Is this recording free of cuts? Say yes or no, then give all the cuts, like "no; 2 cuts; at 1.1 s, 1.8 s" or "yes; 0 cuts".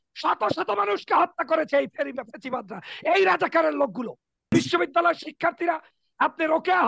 no; 1 cut; at 4.5 s